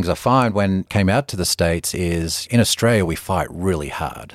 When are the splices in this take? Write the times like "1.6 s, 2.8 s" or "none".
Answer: 0.9 s, 2.4 s